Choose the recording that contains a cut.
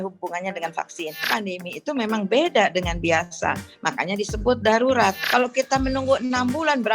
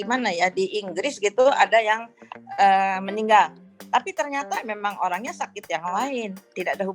first; 2 cuts; at 1.3 s, 5.2 s

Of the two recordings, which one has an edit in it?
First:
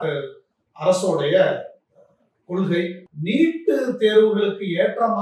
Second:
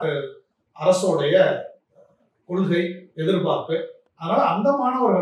first; 1 cut; at 3.1 s

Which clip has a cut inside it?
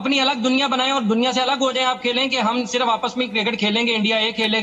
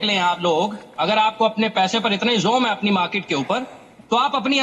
second; 1 cut; at 1.1 s

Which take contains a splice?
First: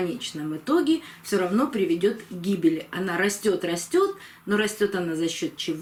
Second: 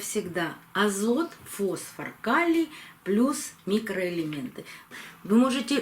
second; 1 cut; at 4.8 s

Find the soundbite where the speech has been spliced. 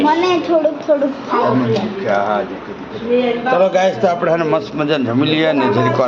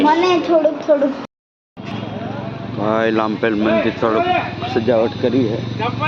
second; 1 cut; at 1.2 s

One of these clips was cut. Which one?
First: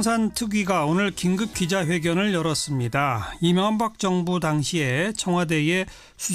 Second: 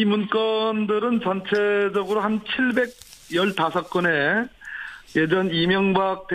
second; 1 cut; at 5.3 s

